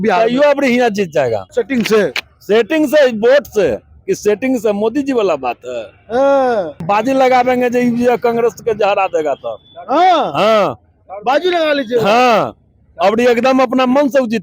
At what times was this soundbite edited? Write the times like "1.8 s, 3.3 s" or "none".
1.4 s, 6.8 s